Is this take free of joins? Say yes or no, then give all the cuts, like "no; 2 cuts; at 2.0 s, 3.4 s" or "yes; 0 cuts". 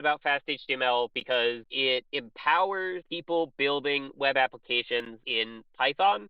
no; 3 cuts; at 1.7 s, 3.1 s, 5.2 s